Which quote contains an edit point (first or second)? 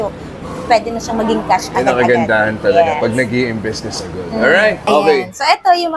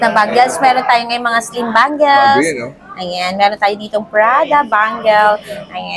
first